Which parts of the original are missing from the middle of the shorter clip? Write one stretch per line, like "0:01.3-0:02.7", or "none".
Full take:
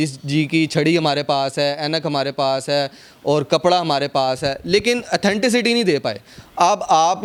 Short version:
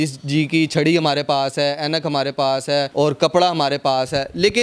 0:02.9-0:03.2